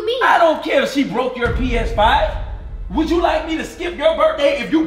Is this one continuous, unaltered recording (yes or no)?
yes